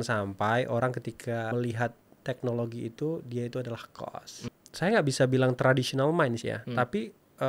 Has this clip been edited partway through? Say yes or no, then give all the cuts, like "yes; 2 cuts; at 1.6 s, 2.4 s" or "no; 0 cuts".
yes; 2 cuts; at 1.5 s, 4.5 s